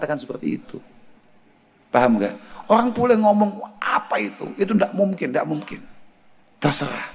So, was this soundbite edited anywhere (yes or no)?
no